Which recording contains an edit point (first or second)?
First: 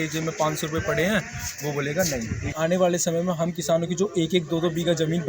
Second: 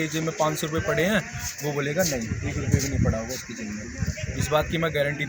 first